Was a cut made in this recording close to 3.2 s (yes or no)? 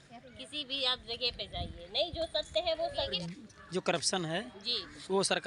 yes